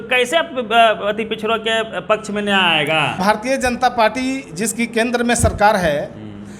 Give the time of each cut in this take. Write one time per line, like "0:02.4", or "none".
0:03.2